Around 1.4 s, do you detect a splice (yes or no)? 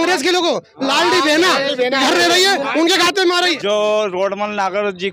no